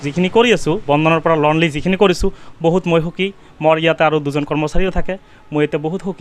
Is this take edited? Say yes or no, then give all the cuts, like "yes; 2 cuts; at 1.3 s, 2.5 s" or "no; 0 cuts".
no; 0 cuts